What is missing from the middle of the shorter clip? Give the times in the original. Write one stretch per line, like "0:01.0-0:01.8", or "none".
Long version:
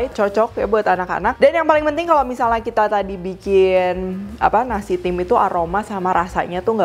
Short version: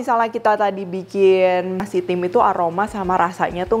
0:04.1-0:04.8

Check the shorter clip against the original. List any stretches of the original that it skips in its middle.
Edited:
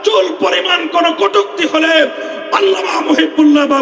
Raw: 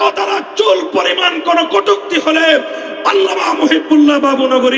none

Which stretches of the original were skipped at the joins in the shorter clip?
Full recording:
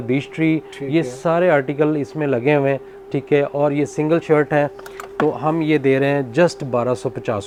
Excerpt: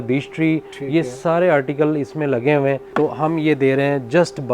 0:02.9-0:05.1

